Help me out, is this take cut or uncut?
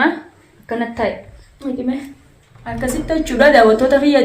cut